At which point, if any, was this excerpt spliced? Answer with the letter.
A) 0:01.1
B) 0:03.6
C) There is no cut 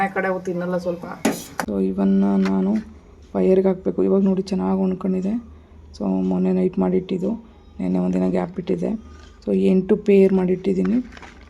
A